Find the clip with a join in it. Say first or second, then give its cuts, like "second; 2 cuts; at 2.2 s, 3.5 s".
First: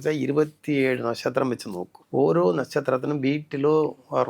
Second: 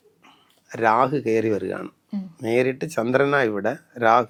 first; 1 cut; at 1.9 s